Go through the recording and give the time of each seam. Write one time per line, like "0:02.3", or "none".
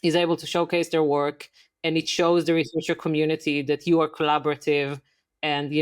none